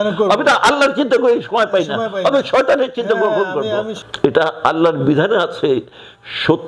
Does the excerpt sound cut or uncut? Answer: cut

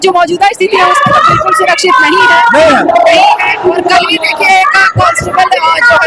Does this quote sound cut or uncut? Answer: uncut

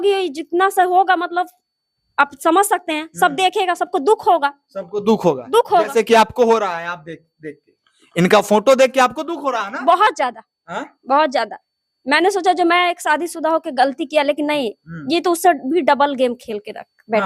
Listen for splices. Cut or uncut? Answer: uncut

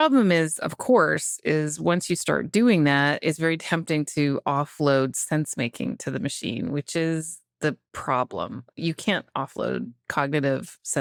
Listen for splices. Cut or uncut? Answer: uncut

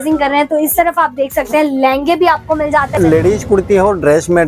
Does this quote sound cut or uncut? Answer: cut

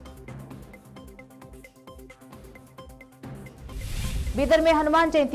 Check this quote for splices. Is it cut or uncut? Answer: cut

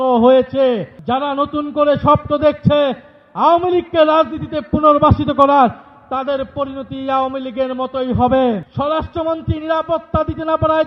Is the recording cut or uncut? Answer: cut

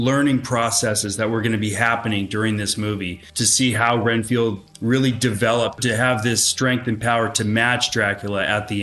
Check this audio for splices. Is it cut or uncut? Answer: cut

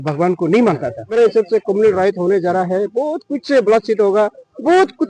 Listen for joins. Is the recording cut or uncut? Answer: cut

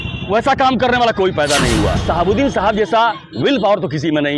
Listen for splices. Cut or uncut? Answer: cut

